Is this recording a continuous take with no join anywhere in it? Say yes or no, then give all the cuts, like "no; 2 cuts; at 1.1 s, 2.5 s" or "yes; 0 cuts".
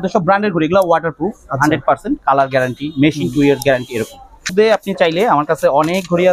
no; 1 cut; at 4.5 s